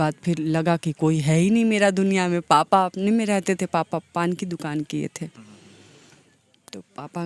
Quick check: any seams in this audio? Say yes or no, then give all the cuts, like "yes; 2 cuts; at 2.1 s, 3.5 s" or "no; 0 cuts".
no; 0 cuts